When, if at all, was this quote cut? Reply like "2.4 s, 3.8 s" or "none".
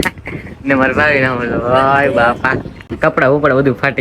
2.8 s